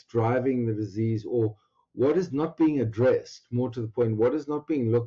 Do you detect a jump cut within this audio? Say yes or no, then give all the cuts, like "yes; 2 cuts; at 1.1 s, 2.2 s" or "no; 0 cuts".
no; 0 cuts